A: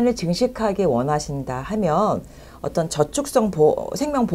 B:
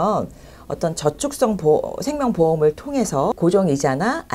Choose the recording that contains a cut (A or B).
B